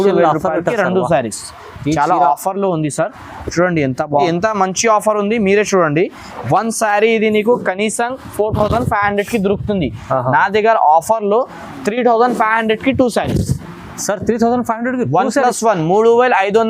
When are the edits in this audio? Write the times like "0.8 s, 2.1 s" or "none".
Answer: 4.3 s